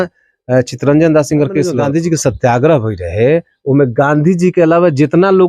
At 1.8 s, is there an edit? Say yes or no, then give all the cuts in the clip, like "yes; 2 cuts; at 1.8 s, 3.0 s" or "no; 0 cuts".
yes; 1 cut; at 1.8 s